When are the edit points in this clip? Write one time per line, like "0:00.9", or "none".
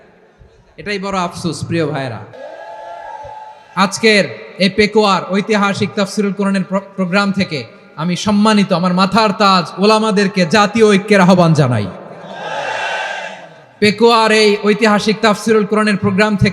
0:02.3